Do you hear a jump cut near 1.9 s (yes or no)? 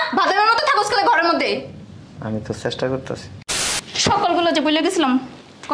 no